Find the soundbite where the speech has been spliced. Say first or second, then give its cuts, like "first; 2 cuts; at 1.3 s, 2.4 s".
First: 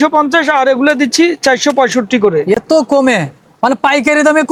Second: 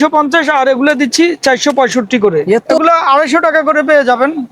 second; 1 cut; at 2.7 s